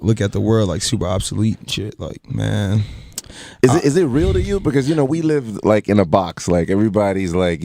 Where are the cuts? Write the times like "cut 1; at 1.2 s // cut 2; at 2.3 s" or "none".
none